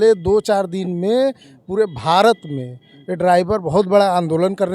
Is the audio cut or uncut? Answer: uncut